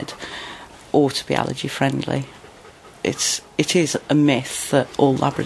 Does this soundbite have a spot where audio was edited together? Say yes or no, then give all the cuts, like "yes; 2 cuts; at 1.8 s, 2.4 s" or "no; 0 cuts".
yes; 2 cuts; at 0.7 s, 2.4 s